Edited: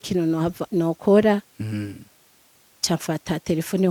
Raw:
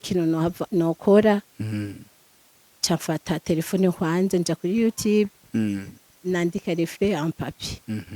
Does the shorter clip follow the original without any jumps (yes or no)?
yes